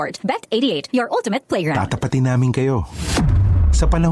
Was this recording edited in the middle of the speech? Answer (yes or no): yes